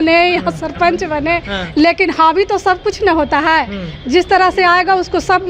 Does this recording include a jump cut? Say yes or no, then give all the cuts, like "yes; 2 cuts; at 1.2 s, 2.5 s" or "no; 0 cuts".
no; 0 cuts